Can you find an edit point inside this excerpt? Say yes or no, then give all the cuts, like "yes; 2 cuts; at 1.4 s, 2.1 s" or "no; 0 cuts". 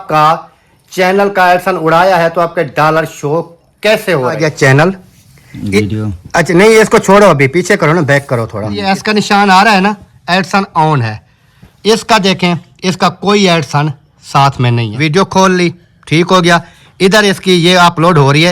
yes; 3 cuts; at 4.4 s, 8.8 s, 14.9 s